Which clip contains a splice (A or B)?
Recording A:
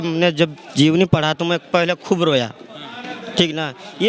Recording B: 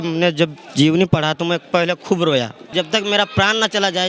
B